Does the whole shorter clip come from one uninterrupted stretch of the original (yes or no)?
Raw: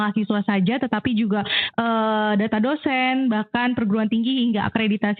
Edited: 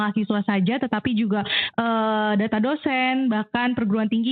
yes